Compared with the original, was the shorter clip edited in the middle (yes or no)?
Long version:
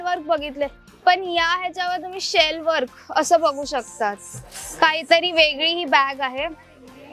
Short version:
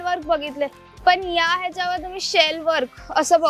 no